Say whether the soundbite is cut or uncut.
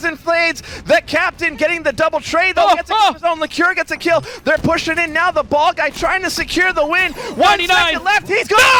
uncut